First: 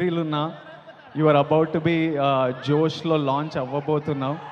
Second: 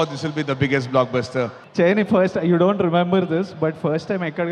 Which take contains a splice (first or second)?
second